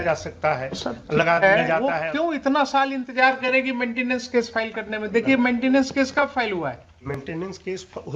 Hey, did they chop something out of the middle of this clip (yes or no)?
yes